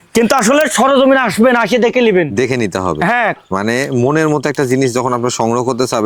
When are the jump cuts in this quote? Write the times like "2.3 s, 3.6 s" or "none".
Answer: none